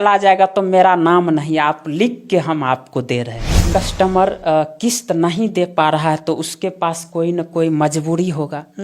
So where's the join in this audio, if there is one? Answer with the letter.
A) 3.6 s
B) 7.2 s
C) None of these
A